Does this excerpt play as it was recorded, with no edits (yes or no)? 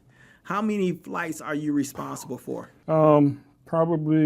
no